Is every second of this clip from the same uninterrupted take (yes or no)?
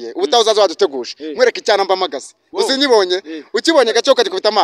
yes